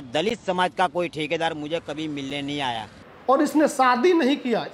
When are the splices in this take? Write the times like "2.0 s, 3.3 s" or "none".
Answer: 2.9 s